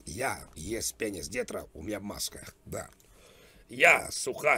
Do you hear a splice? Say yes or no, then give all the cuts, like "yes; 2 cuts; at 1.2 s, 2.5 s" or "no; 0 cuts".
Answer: no; 0 cuts